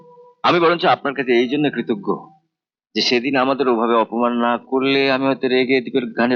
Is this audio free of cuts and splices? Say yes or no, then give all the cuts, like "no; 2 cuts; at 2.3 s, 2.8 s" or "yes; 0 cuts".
yes; 0 cuts